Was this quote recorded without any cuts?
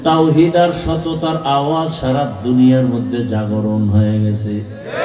yes; 0 cuts

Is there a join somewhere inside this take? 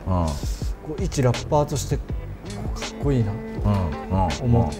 no; 0 cuts

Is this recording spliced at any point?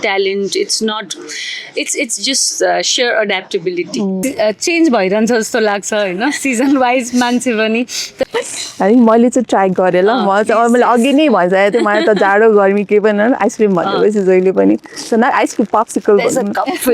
yes; 2 cuts; at 4.2 s, 8.2 s

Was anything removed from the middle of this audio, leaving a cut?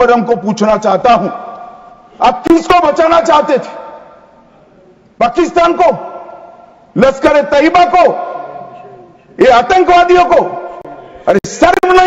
no; 0 cuts

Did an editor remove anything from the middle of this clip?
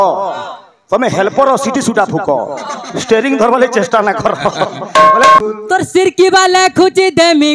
yes; 1 cut; at 5.4 s

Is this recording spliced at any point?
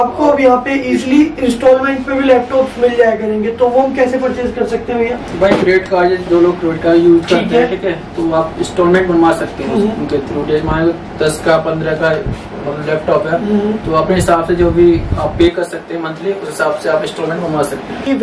no; 0 cuts

